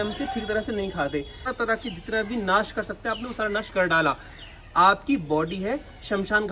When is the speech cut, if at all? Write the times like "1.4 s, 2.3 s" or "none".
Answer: 1.5 s